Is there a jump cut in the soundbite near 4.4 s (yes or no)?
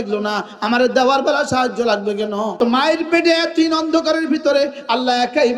no